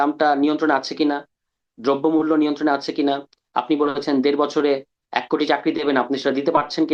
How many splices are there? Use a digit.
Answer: 0